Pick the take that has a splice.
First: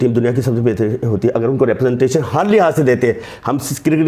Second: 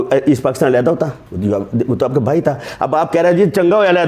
second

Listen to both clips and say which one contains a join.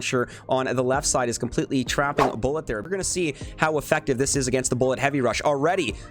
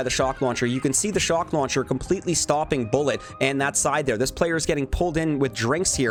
first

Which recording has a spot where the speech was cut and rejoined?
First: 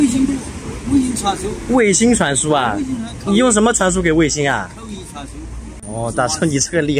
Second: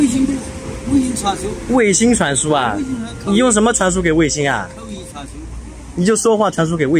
first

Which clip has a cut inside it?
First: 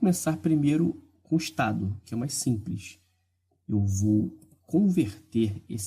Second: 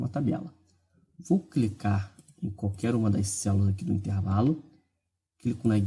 second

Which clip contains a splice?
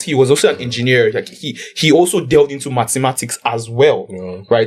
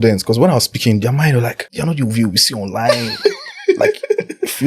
second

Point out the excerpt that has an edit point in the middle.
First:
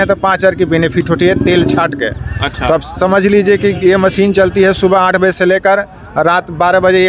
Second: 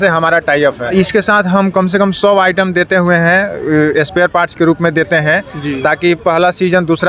second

